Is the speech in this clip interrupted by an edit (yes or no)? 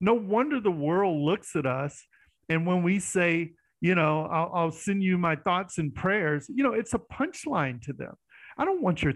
no